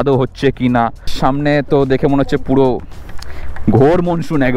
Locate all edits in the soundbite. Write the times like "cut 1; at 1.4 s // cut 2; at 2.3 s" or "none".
cut 1; at 1.1 s